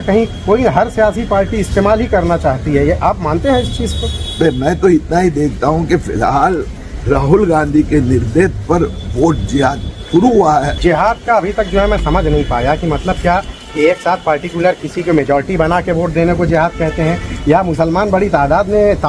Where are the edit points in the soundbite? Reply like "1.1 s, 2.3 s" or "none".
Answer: 10.7 s